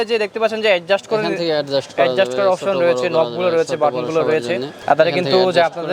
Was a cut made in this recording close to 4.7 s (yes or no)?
no